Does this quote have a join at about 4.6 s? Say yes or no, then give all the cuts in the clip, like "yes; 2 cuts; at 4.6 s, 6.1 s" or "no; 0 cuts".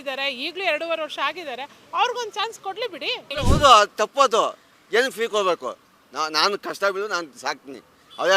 no; 1 cut; at 3.2 s